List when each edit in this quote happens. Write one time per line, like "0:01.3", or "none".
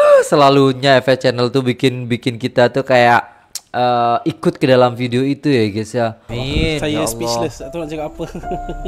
0:06.3